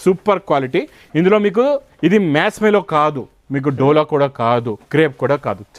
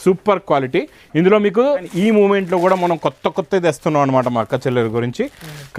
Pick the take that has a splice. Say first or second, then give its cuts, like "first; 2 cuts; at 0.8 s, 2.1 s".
second; 1 cut; at 1.9 s